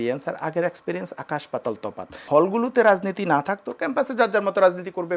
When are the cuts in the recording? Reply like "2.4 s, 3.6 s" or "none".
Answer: 2.2 s